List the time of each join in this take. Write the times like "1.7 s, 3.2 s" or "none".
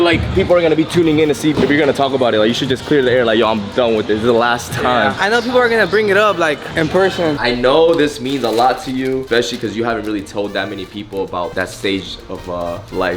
1.5 s, 7.4 s, 9.2 s